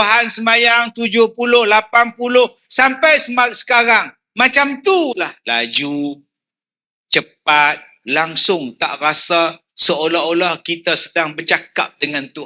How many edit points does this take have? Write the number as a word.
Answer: two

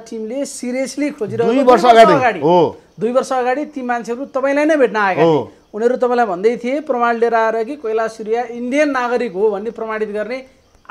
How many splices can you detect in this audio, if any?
zero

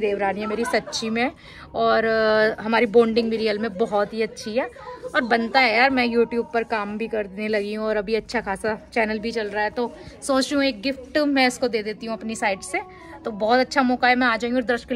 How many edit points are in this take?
zero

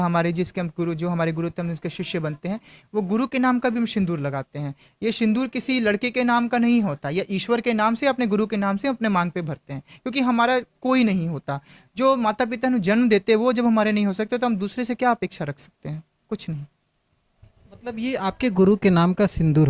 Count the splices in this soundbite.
zero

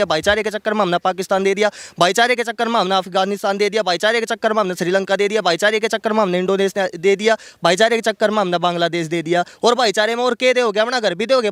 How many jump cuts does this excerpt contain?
zero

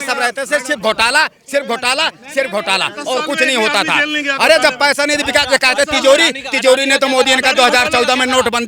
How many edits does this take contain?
zero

